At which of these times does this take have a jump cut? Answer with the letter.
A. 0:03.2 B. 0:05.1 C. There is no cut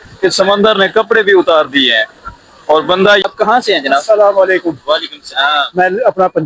A